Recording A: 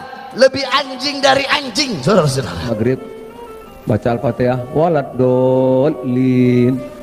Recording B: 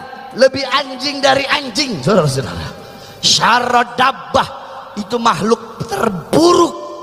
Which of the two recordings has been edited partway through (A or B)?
A